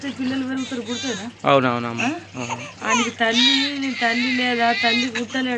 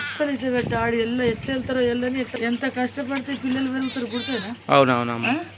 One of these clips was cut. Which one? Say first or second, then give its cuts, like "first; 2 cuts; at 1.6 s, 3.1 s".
second; 1 cut; at 2.3 s